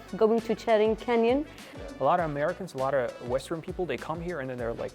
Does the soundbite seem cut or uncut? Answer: cut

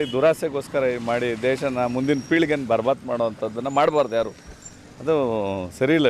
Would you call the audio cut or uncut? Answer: uncut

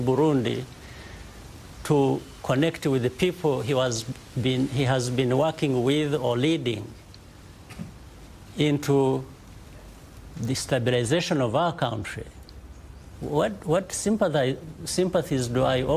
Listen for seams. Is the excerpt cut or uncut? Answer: uncut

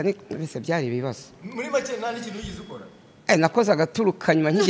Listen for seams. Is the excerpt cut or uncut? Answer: uncut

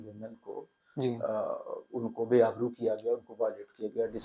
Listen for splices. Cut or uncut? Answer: uncut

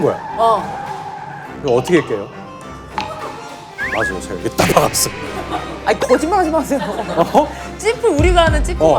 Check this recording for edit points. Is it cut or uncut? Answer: uncut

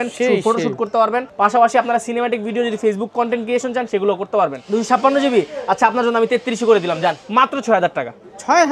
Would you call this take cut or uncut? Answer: cut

